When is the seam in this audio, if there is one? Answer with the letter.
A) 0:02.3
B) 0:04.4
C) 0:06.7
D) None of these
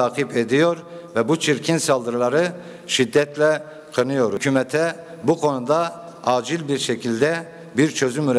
B